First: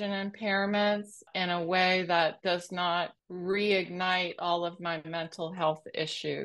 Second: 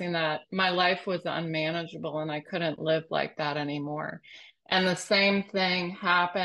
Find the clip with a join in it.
first; 2 cuts; at 1.3 s, 3.2 s

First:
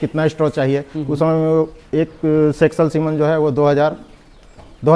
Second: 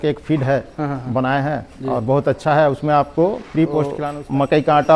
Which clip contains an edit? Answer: second; 1 cut; at 4.1 s

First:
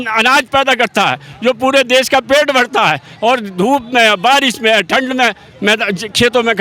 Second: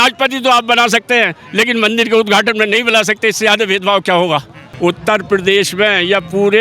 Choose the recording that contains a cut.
second; 1 cut; at 4.6 s

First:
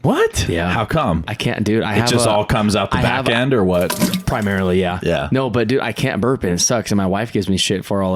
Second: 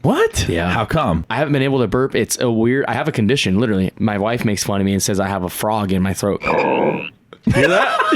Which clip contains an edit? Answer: second; 3 cuts; at 1.3 s, 3.9 s, 6.4 s

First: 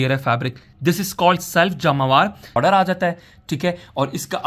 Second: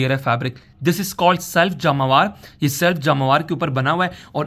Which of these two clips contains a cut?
first; 1 cut; at 2.6 s

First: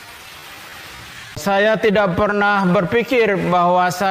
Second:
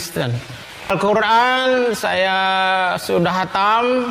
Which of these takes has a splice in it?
second; 1 cut; at 0.9 s

